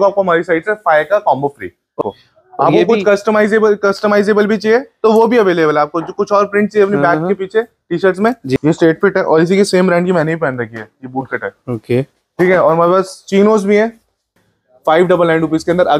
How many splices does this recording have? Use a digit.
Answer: 3